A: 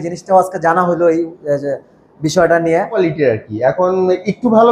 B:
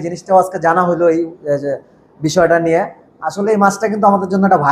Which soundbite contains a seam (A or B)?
A